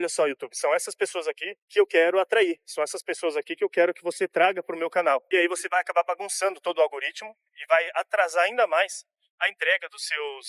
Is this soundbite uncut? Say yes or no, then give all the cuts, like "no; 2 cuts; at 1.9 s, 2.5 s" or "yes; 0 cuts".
yes; 0 cuts